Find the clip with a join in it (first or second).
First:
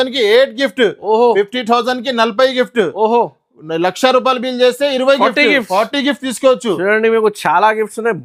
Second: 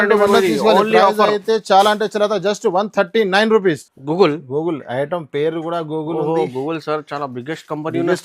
second